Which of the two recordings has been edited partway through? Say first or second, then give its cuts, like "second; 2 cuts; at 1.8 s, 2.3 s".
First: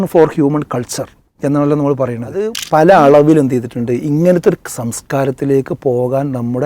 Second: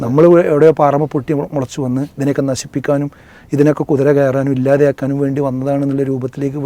first; 1 cut; at 2.6 s